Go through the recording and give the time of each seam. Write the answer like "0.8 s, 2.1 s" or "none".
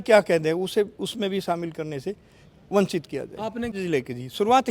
3.7 s